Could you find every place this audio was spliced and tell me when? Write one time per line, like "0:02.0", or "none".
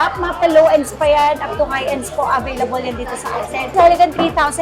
0:03.7